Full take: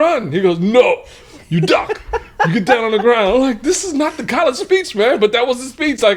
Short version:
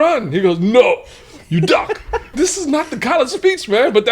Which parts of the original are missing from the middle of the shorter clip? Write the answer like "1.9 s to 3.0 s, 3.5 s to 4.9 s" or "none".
2.3 s to 3.6 s

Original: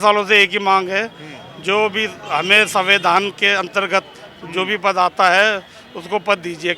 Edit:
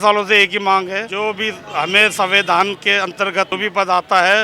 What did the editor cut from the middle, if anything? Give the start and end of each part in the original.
1.1 s to 1.6 s, 4.1 s to 4.6 s

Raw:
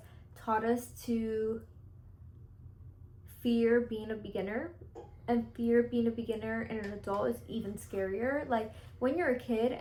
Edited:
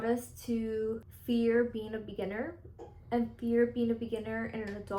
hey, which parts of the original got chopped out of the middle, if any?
1.7 s to 3.3 s

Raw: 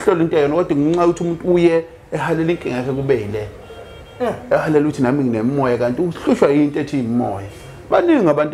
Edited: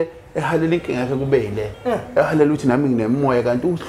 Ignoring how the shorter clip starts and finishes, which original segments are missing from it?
3.5 s to 4.0 s

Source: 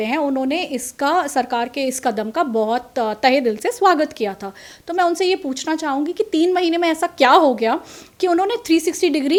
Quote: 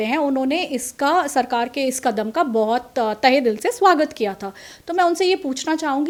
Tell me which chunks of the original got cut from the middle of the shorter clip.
none

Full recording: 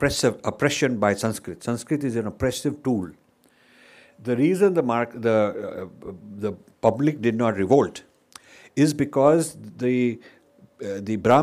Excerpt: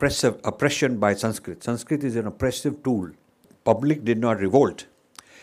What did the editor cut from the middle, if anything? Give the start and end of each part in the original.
3.5 s to 6.7 s

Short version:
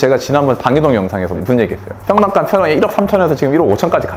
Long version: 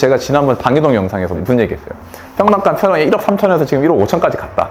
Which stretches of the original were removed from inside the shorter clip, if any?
1.9 s to 2.2 s

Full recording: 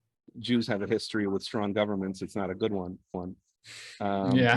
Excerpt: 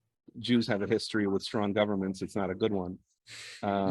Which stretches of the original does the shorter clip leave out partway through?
3.0 s to 3.4 s

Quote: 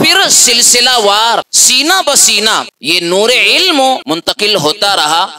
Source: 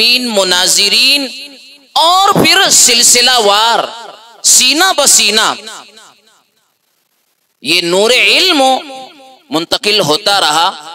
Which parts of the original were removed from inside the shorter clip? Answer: 4.0 s to 4.5 s, 5.7 s to 7.6 s, 8.8 s to 9.5 s

